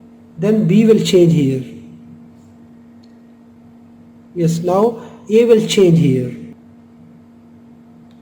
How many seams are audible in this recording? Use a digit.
1